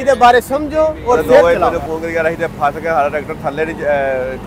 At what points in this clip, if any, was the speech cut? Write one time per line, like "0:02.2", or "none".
0:01.4